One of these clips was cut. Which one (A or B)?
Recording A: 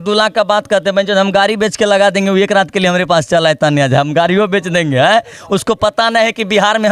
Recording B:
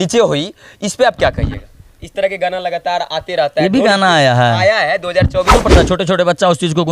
B